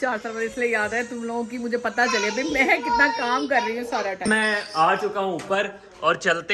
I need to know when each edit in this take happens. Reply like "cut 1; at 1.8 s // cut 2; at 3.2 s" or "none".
cut 1; at 4.2 s